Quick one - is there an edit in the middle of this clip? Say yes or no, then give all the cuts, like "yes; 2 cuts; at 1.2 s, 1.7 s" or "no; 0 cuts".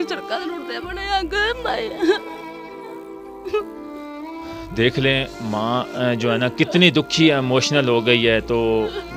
no; 0 cuts